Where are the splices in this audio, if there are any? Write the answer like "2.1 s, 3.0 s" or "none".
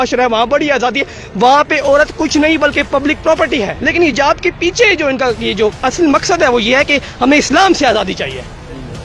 3.9 s